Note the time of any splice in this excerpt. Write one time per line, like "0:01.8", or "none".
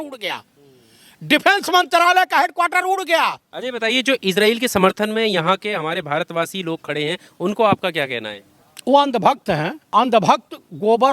0:03.5
0:09.8